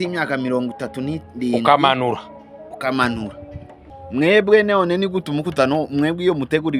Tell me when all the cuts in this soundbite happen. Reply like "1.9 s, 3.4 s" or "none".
3.9 s